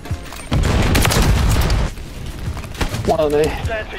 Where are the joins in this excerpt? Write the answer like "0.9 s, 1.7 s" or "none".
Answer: 1.9 s